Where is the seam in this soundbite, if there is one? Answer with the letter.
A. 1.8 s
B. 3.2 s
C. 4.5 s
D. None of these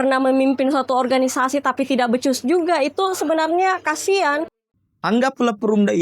C